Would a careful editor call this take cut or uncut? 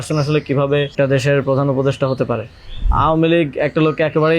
cut